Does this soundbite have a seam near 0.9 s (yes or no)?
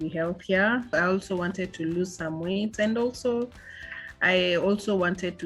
yes